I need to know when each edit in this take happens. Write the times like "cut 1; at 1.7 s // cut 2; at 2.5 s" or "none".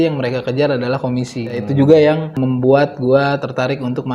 cut 1; at 1.6 s // cut 2; at 2.3 s